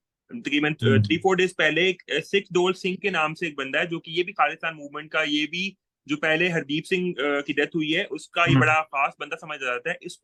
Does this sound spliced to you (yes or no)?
no